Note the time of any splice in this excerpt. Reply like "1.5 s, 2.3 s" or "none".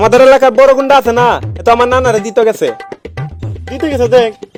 none

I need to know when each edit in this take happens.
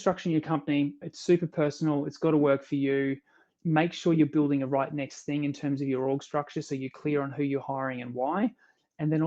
1.1 s

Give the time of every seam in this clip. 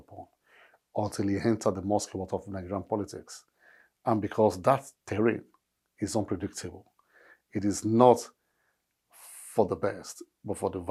none

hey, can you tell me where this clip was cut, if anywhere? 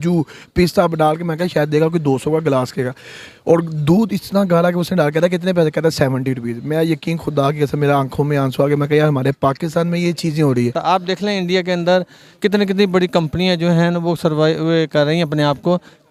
10.8 s

